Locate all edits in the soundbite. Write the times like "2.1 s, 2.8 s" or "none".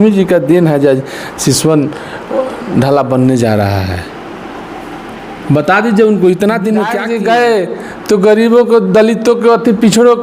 7.0 s